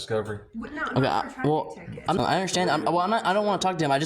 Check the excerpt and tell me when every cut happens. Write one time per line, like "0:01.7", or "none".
0:02.2